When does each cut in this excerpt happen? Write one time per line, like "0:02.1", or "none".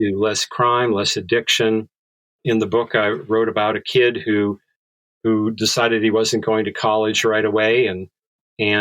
0:02.4